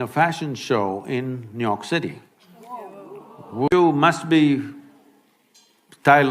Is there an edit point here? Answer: yes; 1 cut; at 3.7 s

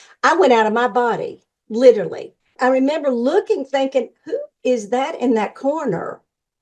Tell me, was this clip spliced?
yes; 1 cut; at 2.5 s

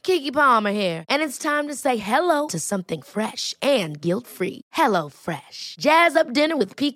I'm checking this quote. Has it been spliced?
no; 0 cuts

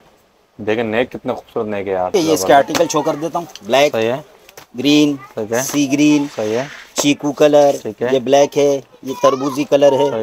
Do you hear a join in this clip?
yes; 1 cut; at 2.1 s

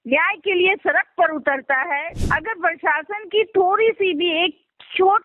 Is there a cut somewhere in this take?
yes; 1 cut; at 2.1 s

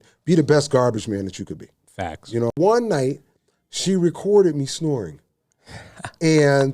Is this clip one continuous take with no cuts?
no; 1 cut; at 2.5 s

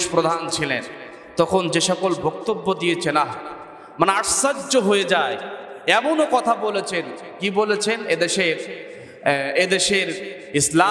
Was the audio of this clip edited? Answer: no; 0 cuts

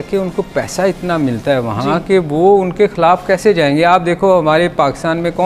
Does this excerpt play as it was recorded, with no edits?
yes; 0 cuts

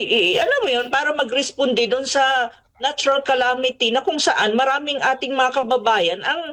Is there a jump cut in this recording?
no; 0 cuts

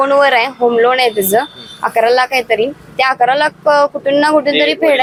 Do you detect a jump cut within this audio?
no; 0 cuts

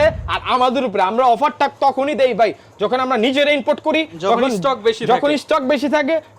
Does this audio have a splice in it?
no; 0 cuts

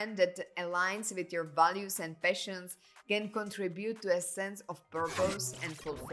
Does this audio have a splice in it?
no; 0 cuts

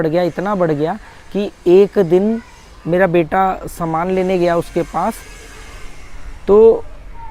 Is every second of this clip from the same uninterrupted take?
yes; 0 cuts

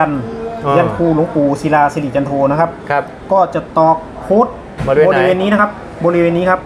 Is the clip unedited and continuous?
yes; 0 cuts

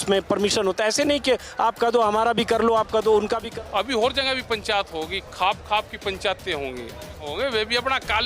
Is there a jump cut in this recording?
yes; 2 cuts; at 3.5 s, 7.3 s

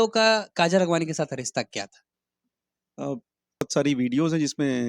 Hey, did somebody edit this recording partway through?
yes; 1 cut; at 3.6 s

